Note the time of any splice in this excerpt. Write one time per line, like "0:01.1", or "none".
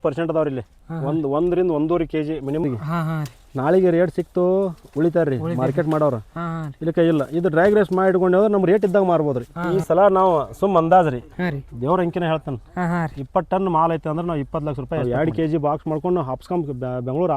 0:02.6
0:09.6
0:15.0